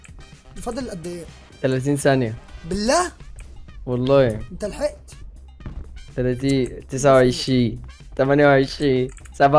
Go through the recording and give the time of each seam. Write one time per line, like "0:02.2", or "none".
0:01.4